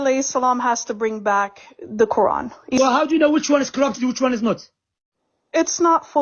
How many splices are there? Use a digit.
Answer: 1